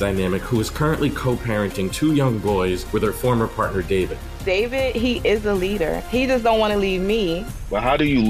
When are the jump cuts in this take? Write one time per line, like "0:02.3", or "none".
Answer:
none